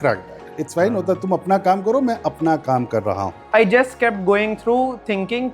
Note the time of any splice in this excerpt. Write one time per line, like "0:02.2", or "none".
0:03.3